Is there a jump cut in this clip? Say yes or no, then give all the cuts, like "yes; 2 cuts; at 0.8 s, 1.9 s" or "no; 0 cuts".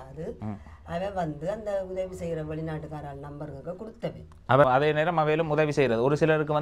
yes; 1 cut; at 4.6 s